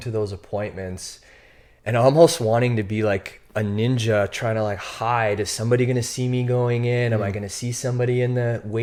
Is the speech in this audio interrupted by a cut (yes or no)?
no